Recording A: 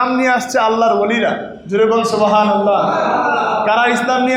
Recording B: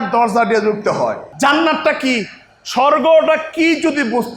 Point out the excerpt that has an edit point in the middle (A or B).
B